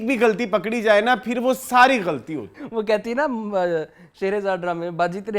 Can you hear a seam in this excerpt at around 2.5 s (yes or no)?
yes